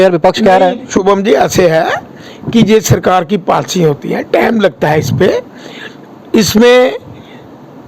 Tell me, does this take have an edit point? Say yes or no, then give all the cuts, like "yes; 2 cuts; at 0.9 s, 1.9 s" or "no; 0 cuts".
no; 0 cuts